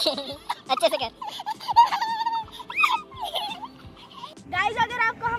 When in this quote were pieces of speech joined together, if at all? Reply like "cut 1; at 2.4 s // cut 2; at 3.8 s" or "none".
cut 1; at 4.3 s

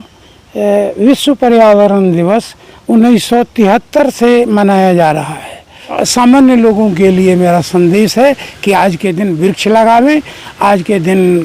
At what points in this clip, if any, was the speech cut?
cut 1; at 6.0 s

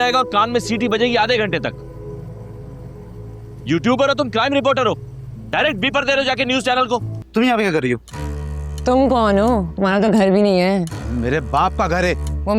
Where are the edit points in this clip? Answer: cut 1; at 7.2 s

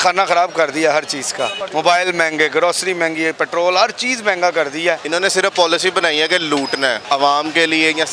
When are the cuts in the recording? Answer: cut 1; at 1.6 s // cut 2; at 5.0 s // cut 3; at 7.0 s

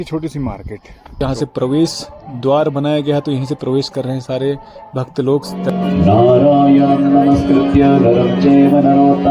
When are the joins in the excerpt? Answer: cut 1; at 1.2 s // cut 2; at 5.7 s

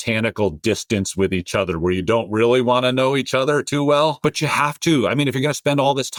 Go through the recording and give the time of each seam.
none

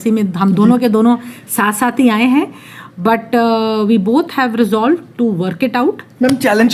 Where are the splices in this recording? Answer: none

